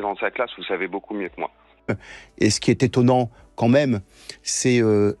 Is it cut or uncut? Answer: cut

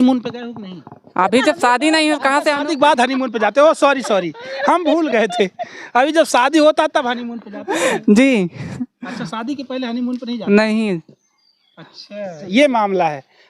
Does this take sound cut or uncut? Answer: uncut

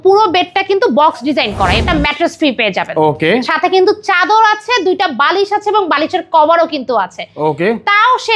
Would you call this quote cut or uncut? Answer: cut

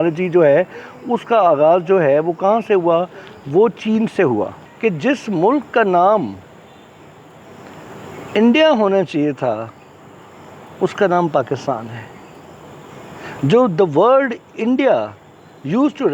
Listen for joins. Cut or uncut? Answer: cut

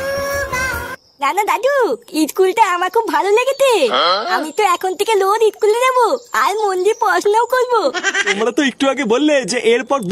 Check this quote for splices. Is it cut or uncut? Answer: cut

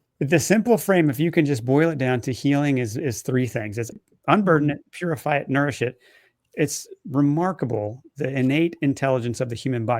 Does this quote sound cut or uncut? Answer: cut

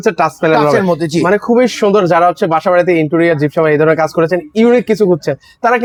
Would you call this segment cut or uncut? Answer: uncut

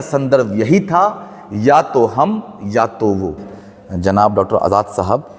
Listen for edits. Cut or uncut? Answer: cut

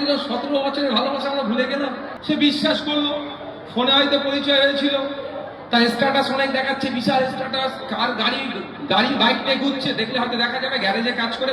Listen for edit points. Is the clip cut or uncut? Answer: cut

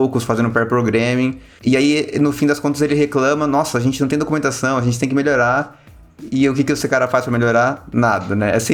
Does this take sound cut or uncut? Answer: uncut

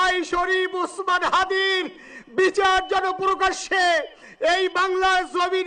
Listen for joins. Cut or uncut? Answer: uncut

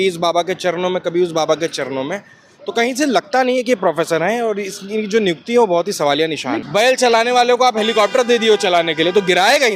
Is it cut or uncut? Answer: cut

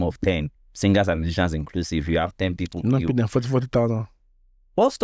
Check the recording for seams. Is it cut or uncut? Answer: uncut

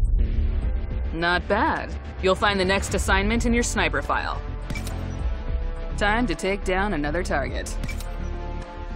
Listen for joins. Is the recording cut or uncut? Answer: uncut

